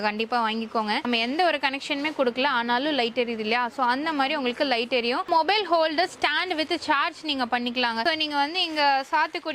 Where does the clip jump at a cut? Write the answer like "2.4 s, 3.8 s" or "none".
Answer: 1.0 s, 5.3 s, 8.0 s